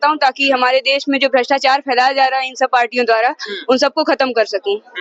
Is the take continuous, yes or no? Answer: yes